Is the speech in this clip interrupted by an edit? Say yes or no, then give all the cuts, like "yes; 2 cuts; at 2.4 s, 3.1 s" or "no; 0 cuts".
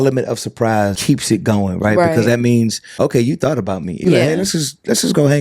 yes; 3 cuts; at 1.0 s, 2.8 s, 4.0 s